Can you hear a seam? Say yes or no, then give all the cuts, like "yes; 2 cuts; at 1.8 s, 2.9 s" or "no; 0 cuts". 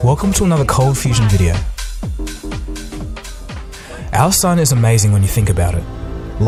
no; 0 cuts